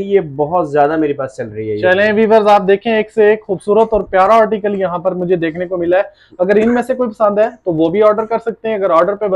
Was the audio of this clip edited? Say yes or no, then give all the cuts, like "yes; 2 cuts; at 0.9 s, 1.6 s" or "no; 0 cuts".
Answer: no; 0 cuts